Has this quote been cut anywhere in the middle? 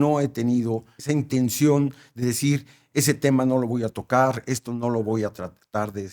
yes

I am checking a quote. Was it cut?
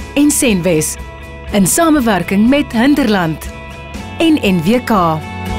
no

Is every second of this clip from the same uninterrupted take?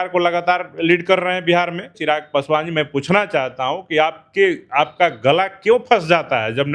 no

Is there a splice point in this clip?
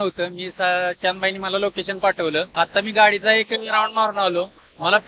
yes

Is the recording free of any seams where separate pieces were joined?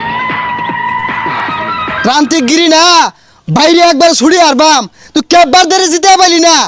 no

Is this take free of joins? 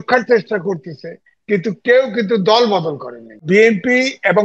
no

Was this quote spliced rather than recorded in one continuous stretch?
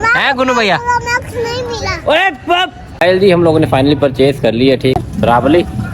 yes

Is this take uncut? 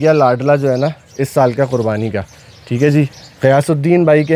yes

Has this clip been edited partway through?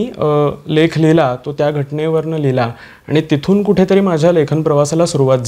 no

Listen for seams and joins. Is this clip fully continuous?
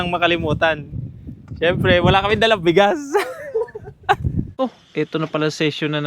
no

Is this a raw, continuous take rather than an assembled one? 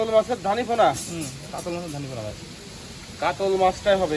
yes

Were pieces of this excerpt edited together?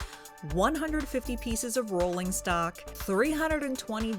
yes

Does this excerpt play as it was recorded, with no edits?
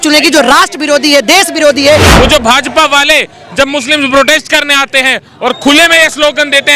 no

